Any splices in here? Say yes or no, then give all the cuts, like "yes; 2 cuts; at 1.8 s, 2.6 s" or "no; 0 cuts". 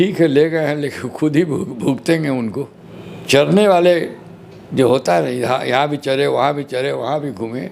yes; 1 cut; at 2.7 s